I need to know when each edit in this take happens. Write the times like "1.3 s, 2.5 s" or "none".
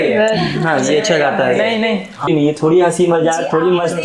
2.3 s